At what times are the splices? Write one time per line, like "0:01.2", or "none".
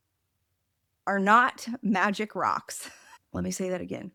none